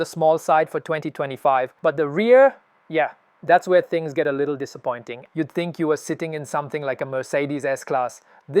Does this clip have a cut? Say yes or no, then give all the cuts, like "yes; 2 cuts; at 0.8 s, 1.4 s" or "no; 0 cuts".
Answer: yes; 2 cuts; at 1.7 s, 5.1 s